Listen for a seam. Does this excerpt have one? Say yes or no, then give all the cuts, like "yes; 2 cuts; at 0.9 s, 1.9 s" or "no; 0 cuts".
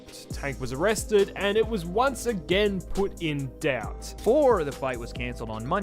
yes; 1 cut; at 4.1 s